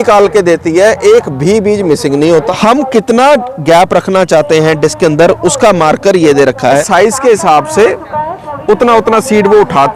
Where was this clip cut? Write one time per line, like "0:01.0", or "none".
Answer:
0:02.5
0:06.9